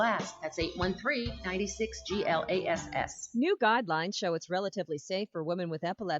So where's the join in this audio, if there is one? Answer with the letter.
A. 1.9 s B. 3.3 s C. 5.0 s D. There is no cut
B